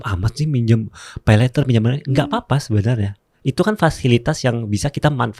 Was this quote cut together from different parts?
no; 0 cuts

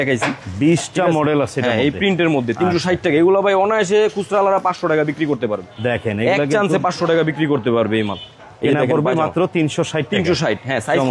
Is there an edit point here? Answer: no; 0 cuts

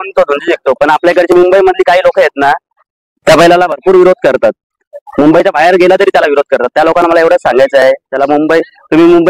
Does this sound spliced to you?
no; 0 cuts

